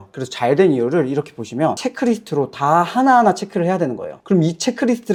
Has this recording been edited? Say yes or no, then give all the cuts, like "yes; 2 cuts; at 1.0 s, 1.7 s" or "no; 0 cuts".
no; 0 cuts